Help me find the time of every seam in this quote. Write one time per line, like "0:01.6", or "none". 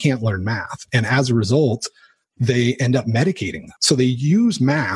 0:03.7